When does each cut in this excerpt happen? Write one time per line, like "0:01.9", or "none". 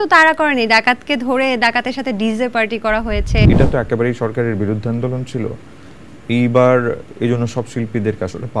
0:03.5